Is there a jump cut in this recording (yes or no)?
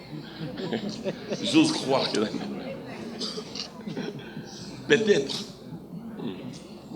no